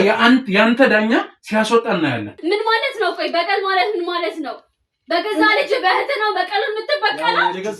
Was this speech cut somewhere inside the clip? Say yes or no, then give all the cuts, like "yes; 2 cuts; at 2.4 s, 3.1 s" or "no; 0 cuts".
yes; 1 cut; at 2.3 s